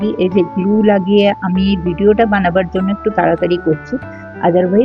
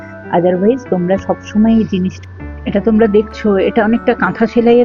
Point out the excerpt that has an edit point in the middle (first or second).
second